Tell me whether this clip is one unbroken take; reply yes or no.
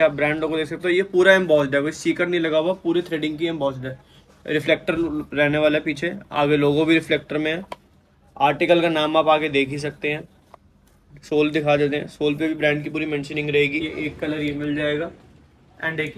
no